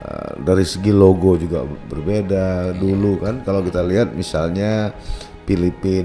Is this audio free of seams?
yes; 0 cuts

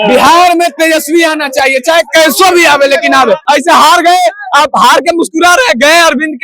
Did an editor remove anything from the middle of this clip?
yes; 1 cut; at 3.4 s

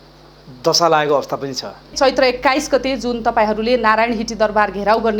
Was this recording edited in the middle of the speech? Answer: yes; 1 cut; at 1.9 s

